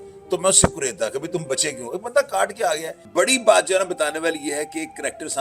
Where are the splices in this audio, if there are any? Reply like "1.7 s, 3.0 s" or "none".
2.9 s

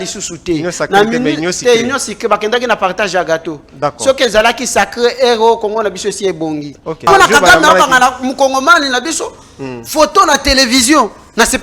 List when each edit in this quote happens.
7.1 s

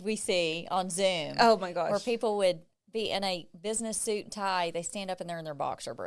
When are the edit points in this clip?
none

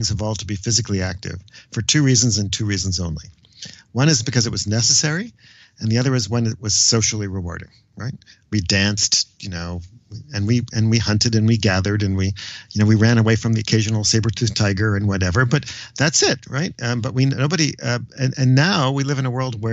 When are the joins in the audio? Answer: none

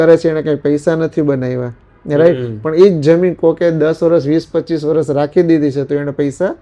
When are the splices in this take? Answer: none

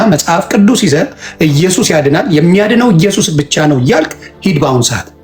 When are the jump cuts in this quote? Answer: none

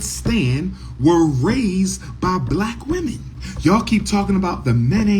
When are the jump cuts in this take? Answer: 3.3 s

